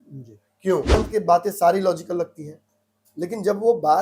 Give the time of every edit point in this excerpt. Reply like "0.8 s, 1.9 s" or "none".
0.9 s